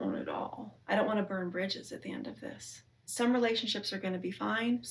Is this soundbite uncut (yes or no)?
yes